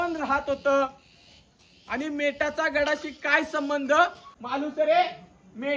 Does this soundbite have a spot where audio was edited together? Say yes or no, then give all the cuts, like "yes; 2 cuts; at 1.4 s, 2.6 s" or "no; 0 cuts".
yes; 1 cut; at 4.3 s